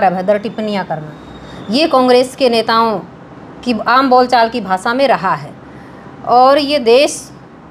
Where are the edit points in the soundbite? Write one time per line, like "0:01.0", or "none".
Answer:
none